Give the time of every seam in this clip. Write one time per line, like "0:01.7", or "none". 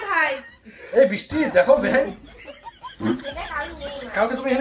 none